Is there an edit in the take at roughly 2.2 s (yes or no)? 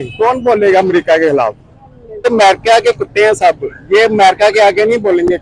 yes